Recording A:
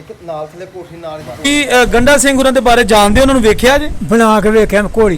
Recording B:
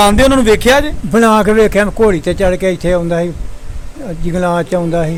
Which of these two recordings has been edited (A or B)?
A